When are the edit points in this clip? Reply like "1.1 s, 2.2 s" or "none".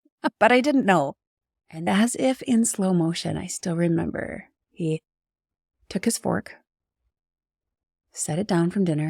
1.9 s, 4.6 s